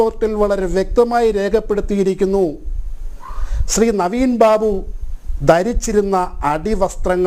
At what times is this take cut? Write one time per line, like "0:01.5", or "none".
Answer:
none

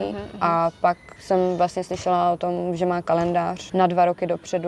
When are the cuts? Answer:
0:01.1
0:03.6

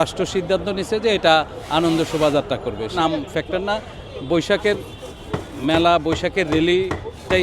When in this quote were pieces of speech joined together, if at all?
0:03.0

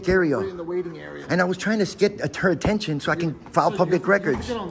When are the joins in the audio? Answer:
none

